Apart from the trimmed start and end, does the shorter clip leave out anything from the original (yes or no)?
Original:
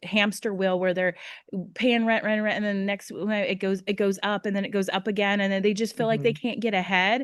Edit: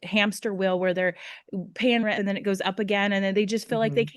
yes